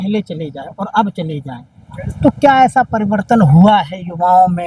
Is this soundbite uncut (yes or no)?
yes